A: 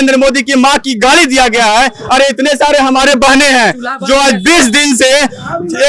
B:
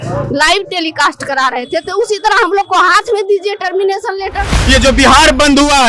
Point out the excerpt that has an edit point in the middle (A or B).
B